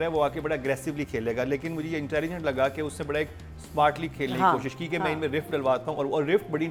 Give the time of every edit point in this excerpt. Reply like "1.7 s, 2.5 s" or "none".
none